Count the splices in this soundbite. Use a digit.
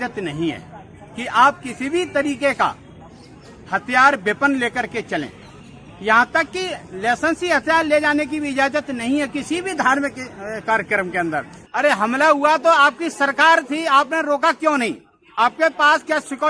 1